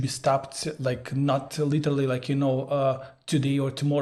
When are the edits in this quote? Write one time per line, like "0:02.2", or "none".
none

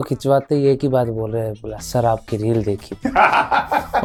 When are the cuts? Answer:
none

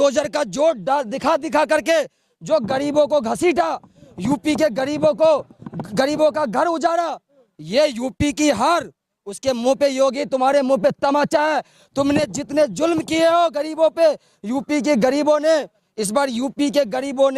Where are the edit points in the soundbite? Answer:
none

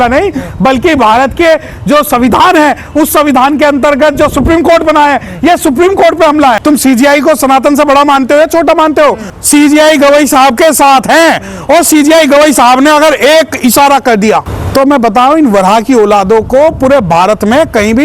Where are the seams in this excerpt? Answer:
0:06.6
0:09.3

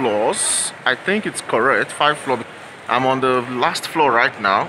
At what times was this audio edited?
0:02.4

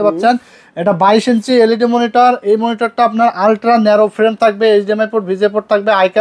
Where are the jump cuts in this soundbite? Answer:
none

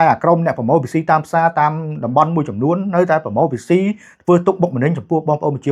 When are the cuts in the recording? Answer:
none

